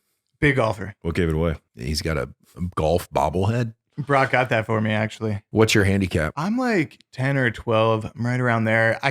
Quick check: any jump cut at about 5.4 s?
yes; 4 cuts; at 0.9 s, 1.7 s, 5.4 s, 6.3 s

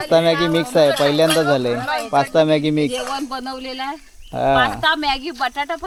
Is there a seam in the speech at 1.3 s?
no; 0 cuts

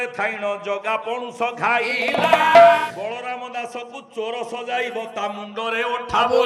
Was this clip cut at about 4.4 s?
no; 1 cut; at 2.9 s

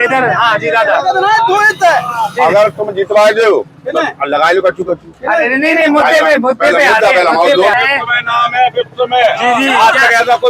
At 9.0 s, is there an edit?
no; 1 cut; at 7.7 s

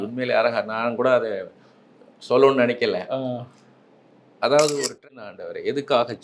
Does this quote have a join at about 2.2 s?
no; 1 cut; at 5.0 s

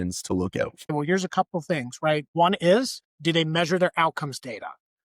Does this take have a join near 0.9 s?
yes; 1 cut; at 0.9 s

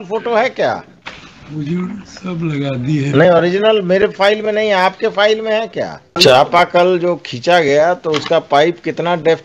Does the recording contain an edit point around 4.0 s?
no; 1 cut; at 6.2 s

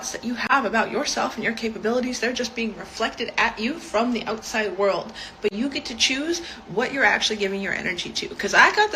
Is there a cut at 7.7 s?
no; 0 cuts

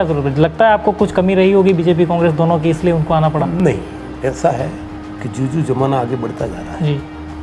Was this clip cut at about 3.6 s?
no; 0 cuts

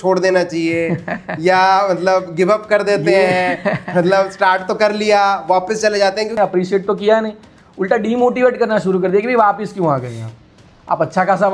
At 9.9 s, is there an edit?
no; 1 cut; at 6.3 s

